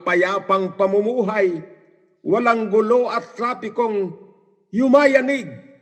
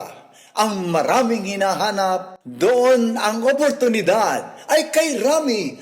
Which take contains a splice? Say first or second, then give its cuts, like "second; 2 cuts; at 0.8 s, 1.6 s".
second; 1 cut; at 2.4 s